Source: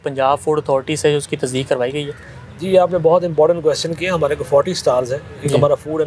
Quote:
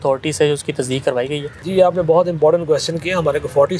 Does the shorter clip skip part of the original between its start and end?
yes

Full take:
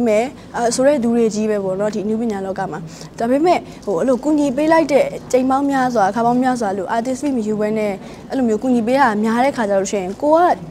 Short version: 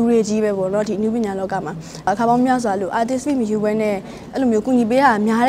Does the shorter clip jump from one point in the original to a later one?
yes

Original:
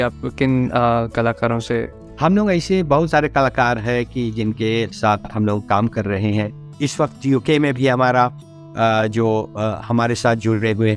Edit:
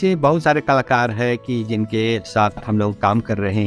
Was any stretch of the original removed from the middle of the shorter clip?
no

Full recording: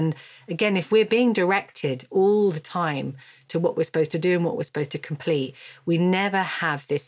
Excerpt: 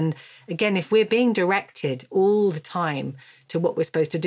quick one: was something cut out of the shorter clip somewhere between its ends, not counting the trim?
no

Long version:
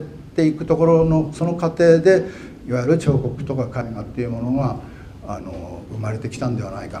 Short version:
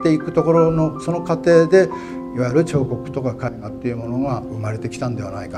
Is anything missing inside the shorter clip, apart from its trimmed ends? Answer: yes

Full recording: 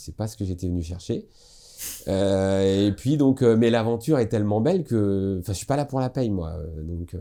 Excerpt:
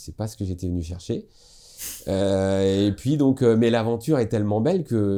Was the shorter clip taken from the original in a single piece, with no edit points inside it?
yes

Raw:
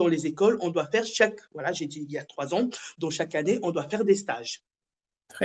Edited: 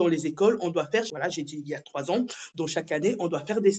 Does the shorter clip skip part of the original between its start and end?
yes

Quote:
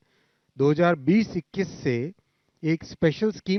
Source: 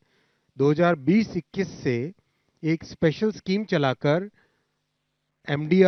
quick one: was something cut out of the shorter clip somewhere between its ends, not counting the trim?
no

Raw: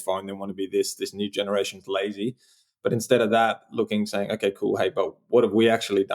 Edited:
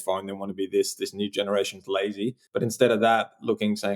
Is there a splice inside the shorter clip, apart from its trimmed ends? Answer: yes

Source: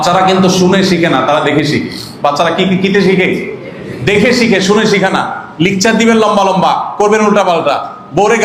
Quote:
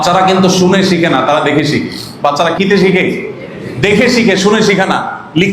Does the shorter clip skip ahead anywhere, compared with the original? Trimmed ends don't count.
yes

